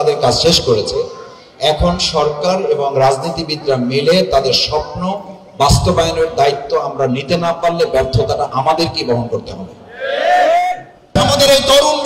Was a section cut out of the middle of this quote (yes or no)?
yes